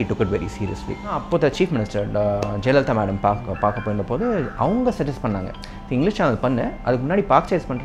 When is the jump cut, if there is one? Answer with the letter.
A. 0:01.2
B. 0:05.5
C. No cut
A